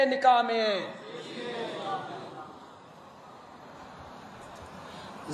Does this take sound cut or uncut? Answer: uncut